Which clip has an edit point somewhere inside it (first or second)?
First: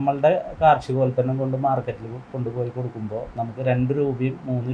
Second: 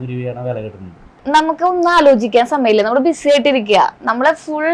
second